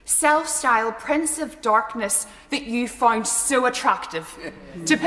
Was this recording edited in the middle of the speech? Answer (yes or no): no